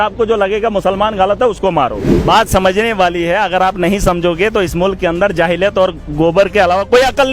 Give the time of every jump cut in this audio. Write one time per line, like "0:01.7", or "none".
0:02.1